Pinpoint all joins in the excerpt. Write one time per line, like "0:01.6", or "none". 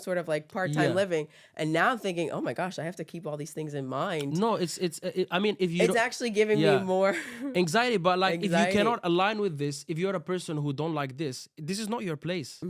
none